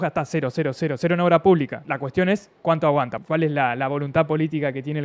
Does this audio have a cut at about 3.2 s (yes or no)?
yes